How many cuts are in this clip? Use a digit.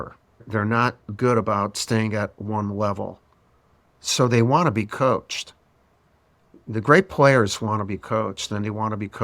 1